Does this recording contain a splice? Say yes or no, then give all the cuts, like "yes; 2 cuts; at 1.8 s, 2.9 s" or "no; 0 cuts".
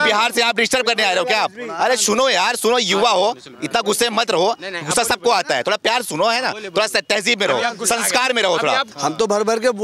yes; 1 cut; at 8.9 s